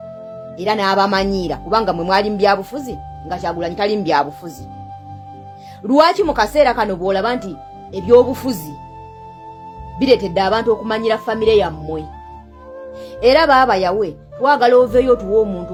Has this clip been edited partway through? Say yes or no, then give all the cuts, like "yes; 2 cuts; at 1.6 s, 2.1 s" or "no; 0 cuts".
no; 0 cuts